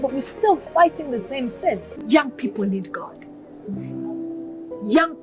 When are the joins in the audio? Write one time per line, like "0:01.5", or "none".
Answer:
0:01.9